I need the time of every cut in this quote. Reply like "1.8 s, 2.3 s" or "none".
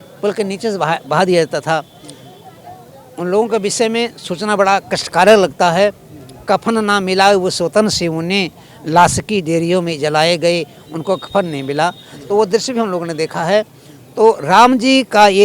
none